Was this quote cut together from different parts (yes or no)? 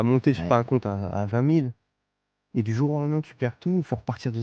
no